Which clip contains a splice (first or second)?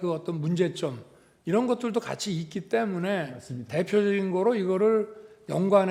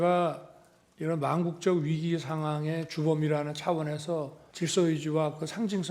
second